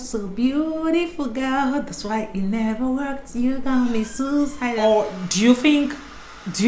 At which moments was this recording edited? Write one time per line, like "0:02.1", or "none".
0:04.6

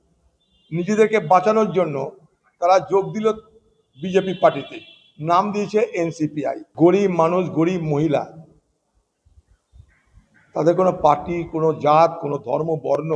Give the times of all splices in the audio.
0:06.6

